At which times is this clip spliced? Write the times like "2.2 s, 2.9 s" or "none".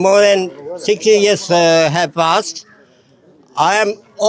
none